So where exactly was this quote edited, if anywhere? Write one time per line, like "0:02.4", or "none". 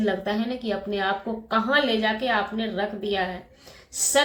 none

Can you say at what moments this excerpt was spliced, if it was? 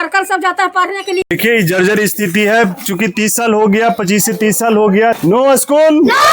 0:01.2
0:05.2

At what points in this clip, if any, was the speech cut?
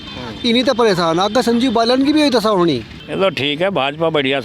0:03.0

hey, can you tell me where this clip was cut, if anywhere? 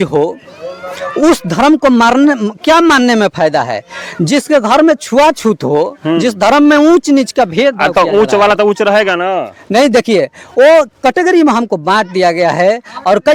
none

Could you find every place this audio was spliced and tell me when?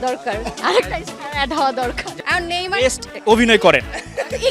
0:02.1

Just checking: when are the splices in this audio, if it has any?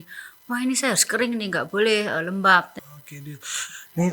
0:02.8

